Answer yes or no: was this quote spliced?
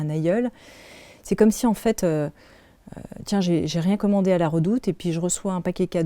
no